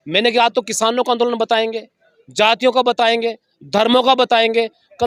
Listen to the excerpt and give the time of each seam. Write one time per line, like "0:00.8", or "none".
none

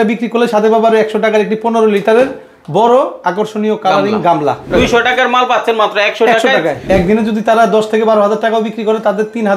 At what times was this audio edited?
0:04.7
0:06.8

